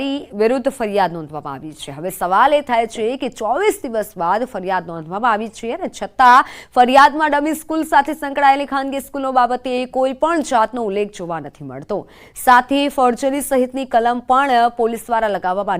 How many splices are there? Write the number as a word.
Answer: zero